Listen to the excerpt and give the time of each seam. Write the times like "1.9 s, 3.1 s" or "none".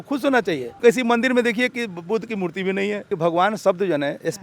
0.8 s, 3.1 s